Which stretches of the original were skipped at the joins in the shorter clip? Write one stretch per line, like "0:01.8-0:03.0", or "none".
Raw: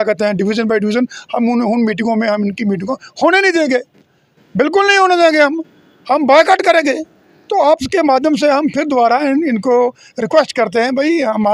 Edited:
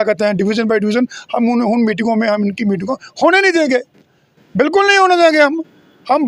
none

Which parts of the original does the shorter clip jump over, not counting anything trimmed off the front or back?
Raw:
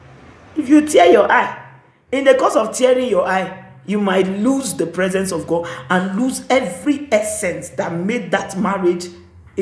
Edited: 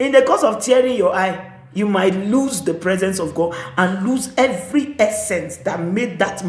none

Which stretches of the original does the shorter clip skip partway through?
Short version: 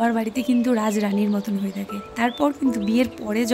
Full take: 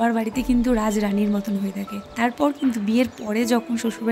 none

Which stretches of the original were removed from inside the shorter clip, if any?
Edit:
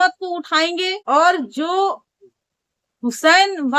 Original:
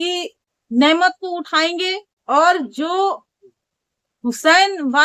0:02.0-0:02.2

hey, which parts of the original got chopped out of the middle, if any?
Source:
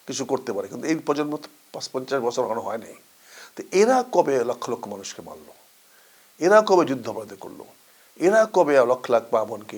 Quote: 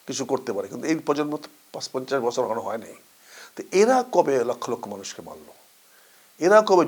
none

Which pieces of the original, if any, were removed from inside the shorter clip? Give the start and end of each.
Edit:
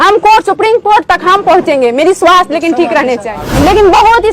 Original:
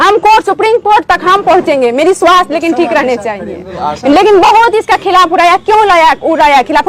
0:03.4-0:03.9

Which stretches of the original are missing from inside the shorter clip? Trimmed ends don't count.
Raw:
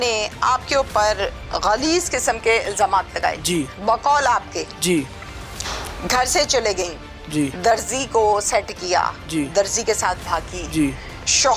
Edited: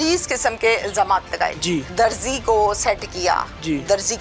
0:03.7-0:07.6

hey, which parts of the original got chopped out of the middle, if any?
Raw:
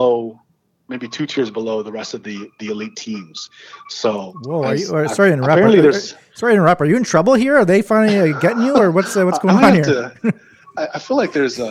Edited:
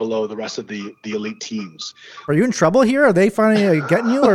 0:03.8-0:06.8

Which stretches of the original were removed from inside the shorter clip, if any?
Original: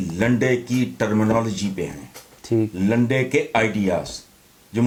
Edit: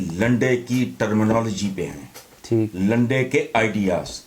none

